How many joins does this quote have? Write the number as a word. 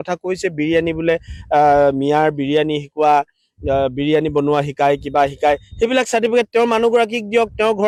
zero